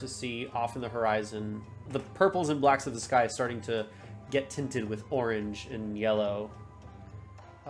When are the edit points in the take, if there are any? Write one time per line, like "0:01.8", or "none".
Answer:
0:01.8

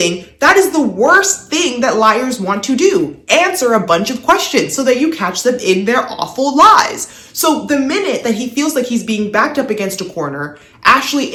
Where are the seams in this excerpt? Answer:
none

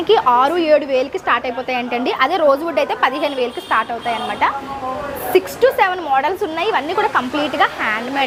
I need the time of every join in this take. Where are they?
none

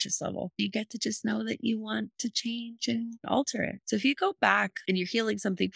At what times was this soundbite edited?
0:03.8
0:04.8

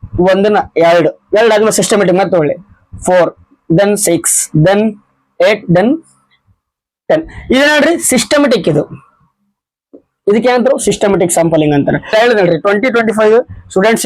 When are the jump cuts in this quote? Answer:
0:12.1

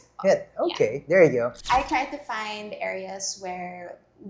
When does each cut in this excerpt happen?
0:01.6

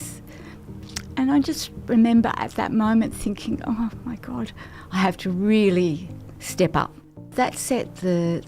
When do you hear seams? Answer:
0:07.3

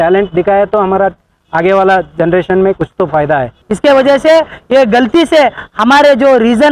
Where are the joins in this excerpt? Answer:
0:03.6

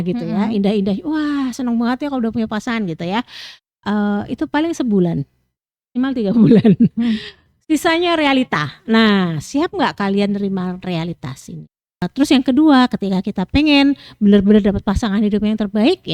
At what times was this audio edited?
0:12.1

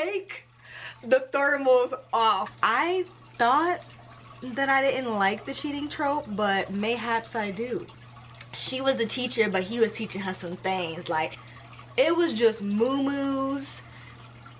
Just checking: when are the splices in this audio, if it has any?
0:02.5
0:08.0
0:11.4

